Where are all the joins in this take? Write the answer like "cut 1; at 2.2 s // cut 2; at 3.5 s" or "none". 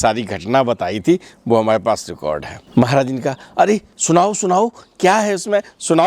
cut 1; at 2.5 s